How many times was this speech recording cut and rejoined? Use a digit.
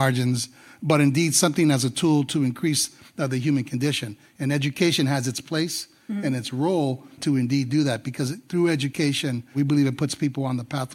1